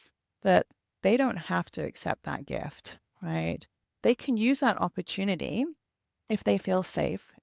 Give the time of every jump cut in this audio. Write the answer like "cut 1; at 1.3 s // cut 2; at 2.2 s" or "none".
cut 1; at 4.0 s

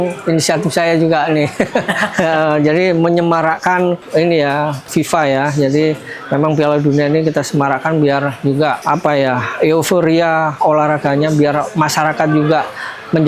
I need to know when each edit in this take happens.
cut 1; at 4.0 s // cut 2; at 4.9 s // cut 3; at 8.8 s

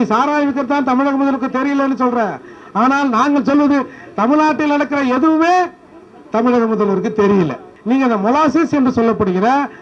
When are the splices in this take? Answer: cut 1; at 7.7 s

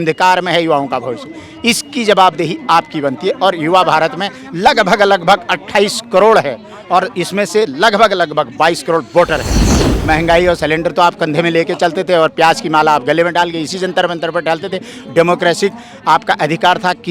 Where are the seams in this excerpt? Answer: cut 1; at 9.8 s

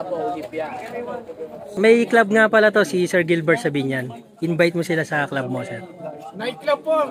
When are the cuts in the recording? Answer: cut 1; at 1.7 s

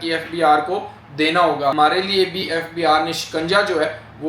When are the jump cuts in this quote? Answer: cut 1; at 1.7 s

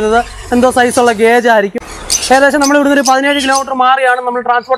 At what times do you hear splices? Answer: cut 1; at 1.8 s

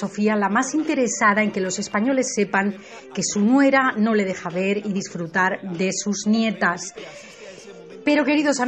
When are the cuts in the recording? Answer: none

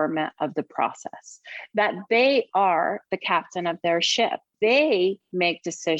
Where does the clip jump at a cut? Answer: cut 1; at 4.5 s

